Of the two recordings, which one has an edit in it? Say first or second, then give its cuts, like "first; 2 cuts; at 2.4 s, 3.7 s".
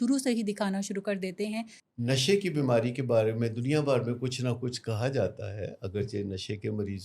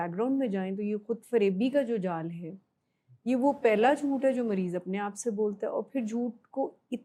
first; 1 cut; at 1.8 s